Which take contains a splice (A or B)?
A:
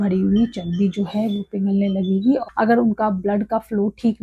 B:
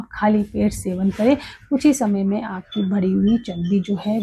A